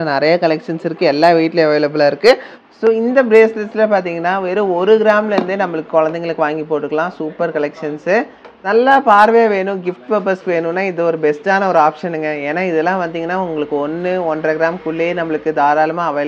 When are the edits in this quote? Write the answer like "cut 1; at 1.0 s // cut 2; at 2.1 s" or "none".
cut 1; at 2.5 s // cut 2; at 8.7 s